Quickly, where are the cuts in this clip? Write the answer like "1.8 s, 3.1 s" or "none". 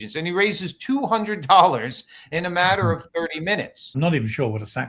4.0 s